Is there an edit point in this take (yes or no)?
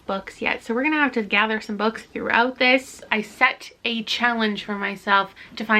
yes